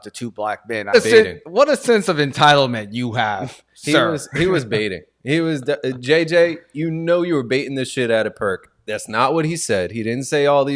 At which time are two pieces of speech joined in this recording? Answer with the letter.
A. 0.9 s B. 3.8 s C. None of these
A